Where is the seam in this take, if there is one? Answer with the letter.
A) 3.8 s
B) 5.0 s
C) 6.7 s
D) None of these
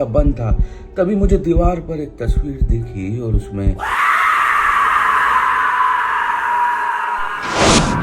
A